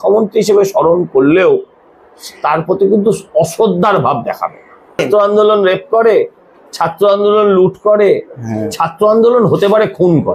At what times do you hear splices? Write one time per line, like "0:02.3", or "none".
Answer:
0:04.9